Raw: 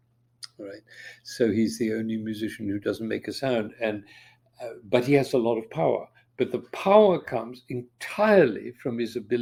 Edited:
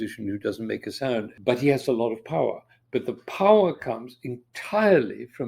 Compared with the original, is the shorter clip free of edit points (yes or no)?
no